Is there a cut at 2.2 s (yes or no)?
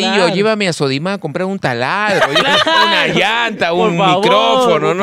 no